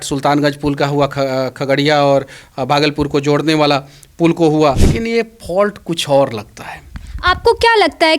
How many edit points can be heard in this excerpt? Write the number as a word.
one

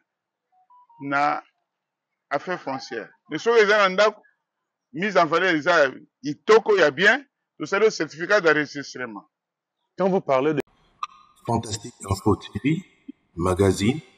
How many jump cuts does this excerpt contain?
one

